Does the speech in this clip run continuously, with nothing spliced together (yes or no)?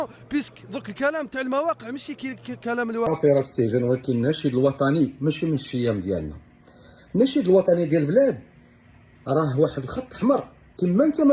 no